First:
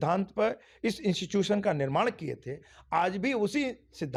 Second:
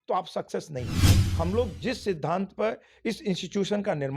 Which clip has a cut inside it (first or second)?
second